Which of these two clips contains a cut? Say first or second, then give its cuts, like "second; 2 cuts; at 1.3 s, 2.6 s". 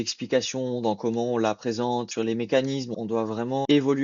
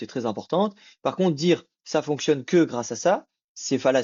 first; 2 cuts; at 2.1 s, 3.2 s